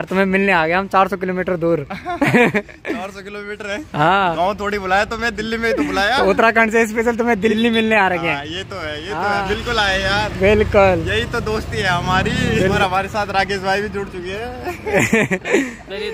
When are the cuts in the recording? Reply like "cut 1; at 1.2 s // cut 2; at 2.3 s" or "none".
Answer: none

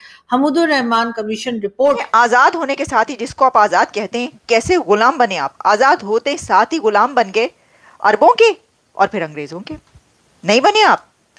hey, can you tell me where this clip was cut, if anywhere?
cut 1; at 2.1 s

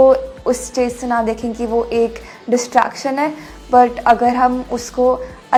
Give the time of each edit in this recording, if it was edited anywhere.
none

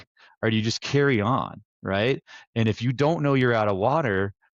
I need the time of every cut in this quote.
none

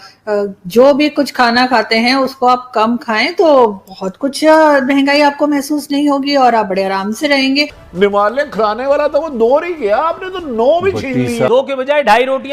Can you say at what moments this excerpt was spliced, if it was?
cut 1; at 7.8 s // cut 2; at 11.5 s

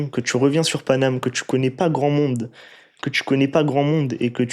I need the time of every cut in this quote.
none

